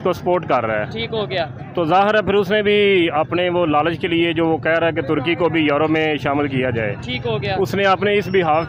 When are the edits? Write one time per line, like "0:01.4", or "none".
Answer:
none